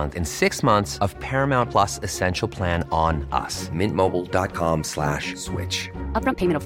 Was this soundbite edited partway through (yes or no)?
no